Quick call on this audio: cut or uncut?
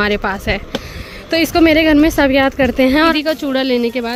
cut